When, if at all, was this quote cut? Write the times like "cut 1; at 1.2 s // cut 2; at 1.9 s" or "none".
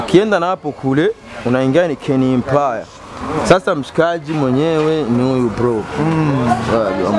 none